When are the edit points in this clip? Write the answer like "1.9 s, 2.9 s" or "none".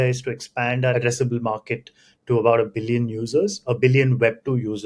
0.9 s